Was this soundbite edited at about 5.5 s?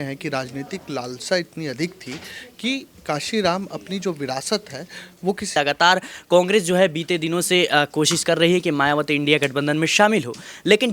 yes; 1 cut; at 5.5 s

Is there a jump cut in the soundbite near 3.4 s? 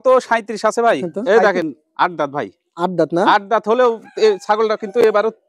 no; 1 cut; at 1.1 s

